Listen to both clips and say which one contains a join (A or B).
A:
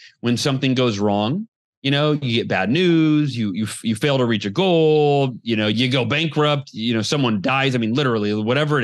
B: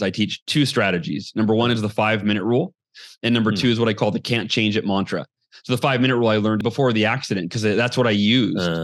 B